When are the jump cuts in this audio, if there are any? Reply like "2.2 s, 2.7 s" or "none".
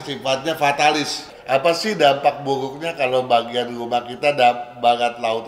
1.3 s